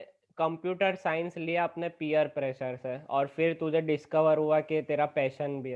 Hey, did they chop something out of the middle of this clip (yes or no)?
no